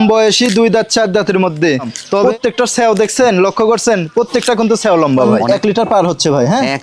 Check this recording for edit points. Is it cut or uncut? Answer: cut